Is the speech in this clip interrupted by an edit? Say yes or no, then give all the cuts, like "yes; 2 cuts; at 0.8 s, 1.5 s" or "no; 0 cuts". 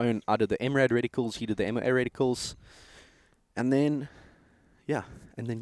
no; 0 cuts